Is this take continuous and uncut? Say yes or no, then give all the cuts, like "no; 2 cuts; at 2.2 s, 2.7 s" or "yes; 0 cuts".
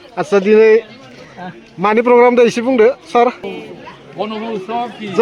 no; 1 cut; at 3.4 s